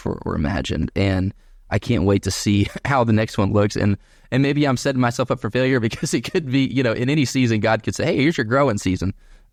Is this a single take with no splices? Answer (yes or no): yes